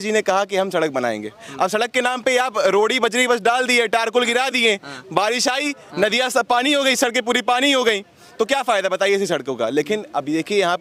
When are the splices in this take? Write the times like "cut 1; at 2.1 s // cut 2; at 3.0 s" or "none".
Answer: none